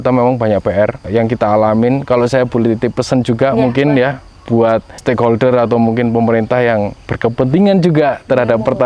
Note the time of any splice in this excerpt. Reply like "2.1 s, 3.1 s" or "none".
1.0 s, 4.9 s